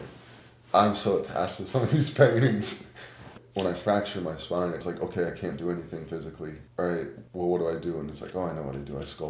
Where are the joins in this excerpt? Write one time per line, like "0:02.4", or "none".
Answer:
0:03.4